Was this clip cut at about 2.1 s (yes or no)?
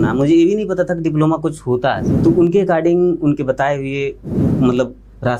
yes